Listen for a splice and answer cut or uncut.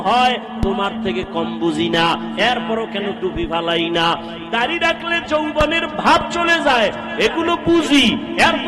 uncut